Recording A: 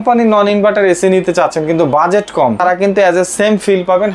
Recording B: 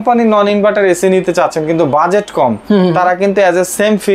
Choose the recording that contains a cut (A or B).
A